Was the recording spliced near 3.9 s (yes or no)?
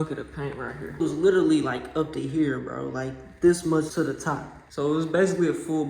yes